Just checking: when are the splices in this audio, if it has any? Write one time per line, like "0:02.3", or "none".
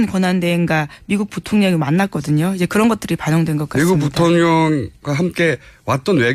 0:01.3